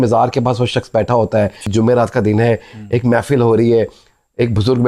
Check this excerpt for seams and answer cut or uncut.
cut